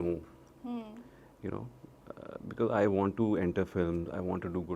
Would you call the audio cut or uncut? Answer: uncut